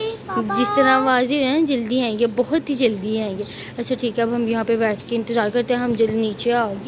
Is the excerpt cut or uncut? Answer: uncut